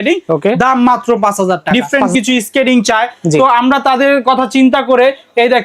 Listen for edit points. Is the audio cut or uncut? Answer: cut